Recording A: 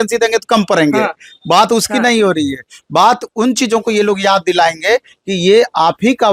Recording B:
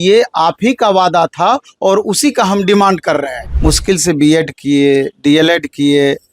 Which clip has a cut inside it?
B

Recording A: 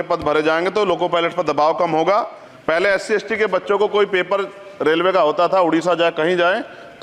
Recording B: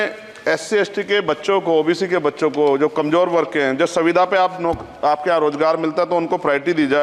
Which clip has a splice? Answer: A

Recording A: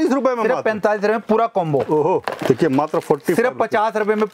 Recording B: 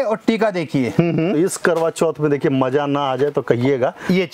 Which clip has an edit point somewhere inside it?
B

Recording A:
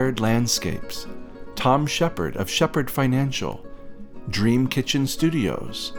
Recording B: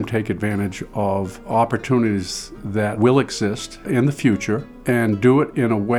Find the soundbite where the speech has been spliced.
B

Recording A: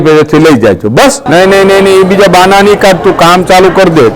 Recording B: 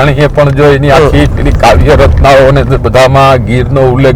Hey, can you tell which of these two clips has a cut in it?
A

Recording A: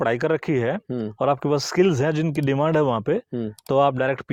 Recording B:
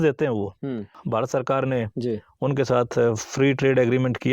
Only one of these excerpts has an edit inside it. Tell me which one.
B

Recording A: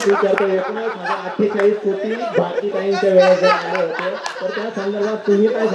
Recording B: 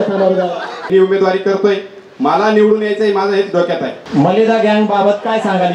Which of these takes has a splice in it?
B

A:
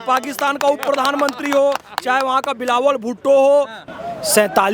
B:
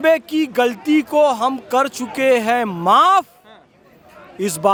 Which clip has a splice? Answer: A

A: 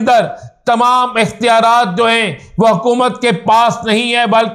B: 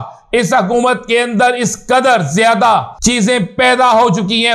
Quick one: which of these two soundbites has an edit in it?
B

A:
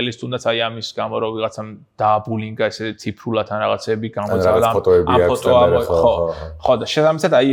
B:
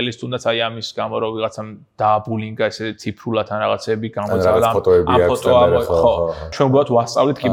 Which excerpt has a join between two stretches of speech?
B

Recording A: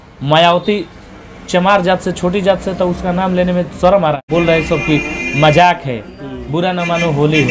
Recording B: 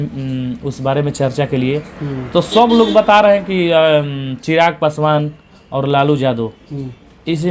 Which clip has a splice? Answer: A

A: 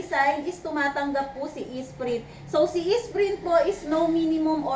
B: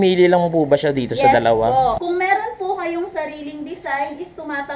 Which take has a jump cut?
B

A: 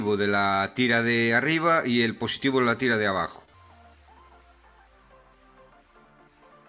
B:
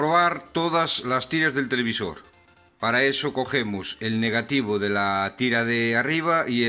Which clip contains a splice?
A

